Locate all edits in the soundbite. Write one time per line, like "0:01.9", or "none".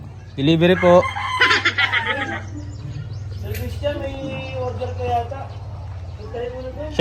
none